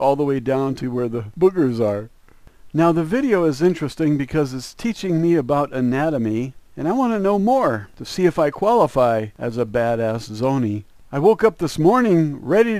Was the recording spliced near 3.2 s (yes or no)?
no